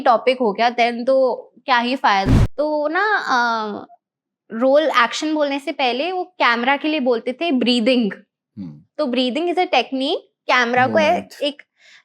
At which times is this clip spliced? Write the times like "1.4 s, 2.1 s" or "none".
2.3 s